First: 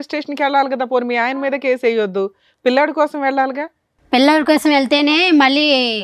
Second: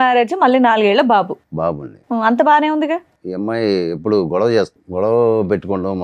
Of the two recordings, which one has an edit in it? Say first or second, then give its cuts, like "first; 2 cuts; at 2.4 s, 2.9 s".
second; 2 cuts; at 3.2 s, 4.8 s